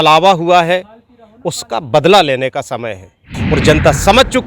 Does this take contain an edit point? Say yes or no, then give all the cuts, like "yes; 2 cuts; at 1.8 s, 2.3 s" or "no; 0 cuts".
yes; 1 cut; at 3.3 s